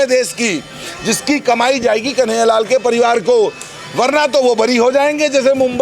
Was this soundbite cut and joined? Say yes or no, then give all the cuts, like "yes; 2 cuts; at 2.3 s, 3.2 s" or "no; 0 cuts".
no; 0 cuts